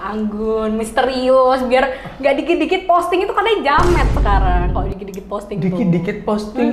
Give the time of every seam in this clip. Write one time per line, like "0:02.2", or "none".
none